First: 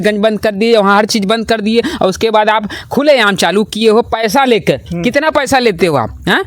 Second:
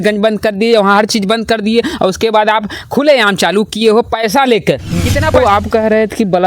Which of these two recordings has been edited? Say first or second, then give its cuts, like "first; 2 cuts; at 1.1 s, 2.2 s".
second; 1 cut; at 5.3 s